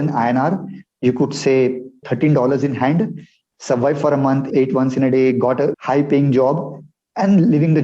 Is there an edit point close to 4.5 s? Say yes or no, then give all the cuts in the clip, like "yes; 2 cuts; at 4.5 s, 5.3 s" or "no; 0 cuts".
yes; 3 cuts; at 2.0 s, 4.5 s, 5.8 s